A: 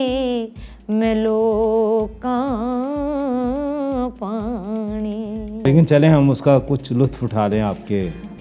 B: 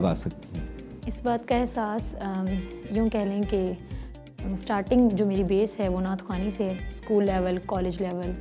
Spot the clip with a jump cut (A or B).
A